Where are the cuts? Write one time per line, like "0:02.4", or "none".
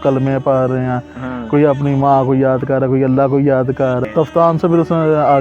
0:04.0

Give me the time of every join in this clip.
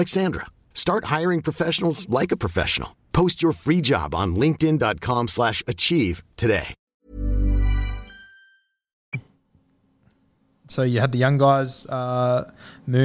none

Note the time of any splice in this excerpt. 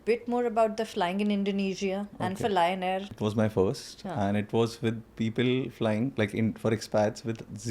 0:03.1

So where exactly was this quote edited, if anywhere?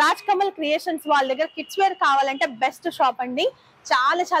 none

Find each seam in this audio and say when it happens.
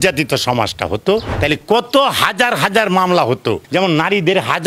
0:01.3
0:03.6

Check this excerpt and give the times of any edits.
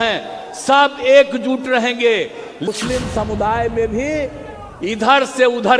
0:02.7

